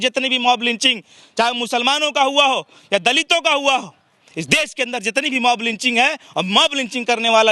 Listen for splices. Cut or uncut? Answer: uncut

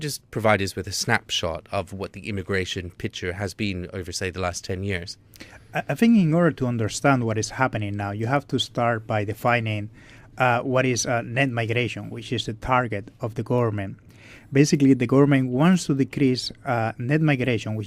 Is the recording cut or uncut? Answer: uncut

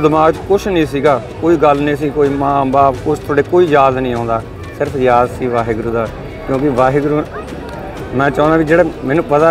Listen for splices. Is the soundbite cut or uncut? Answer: uncut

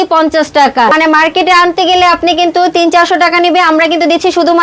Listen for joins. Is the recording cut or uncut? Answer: cut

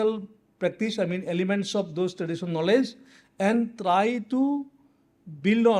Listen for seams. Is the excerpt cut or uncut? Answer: uncut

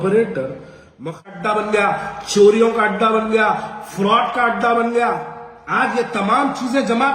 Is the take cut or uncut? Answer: cut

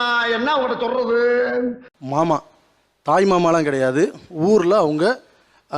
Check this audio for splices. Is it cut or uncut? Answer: cut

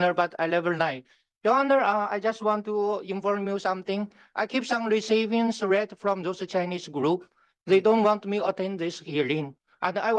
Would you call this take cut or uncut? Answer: uncut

